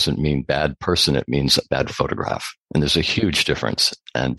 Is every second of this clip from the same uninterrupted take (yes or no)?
yes